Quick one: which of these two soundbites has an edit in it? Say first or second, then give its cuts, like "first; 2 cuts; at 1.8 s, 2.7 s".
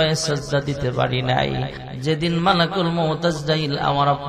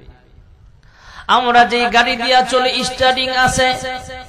first; 1 cut; at 1.8 s